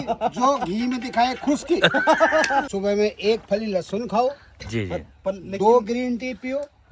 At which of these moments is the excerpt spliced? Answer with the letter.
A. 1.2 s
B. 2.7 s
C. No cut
B